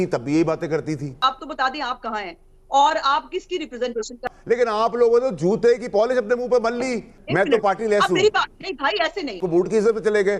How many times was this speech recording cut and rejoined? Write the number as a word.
four